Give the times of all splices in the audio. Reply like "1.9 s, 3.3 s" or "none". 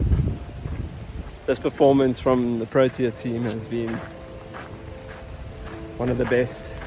none